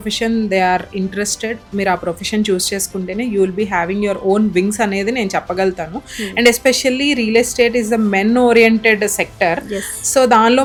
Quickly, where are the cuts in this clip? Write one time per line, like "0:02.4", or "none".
none